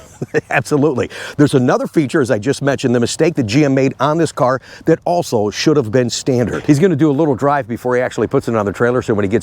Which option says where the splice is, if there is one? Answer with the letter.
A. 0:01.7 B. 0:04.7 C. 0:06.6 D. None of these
C